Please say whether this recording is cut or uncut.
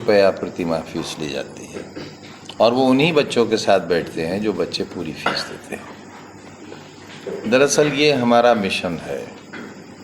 uncut